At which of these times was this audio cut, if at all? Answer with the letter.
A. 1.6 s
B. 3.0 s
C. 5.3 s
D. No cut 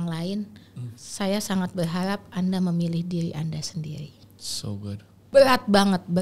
C